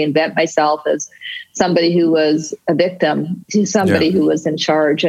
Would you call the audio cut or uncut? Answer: uncut